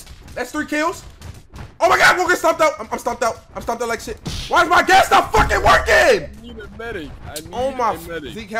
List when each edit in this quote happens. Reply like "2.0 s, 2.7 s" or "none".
none

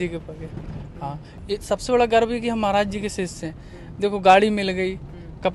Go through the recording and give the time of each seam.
1.4 s

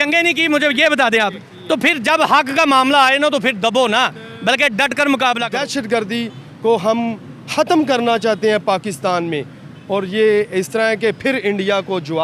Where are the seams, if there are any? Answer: 5.5 s

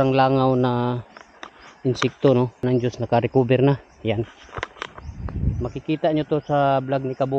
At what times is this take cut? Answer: 2.6 s

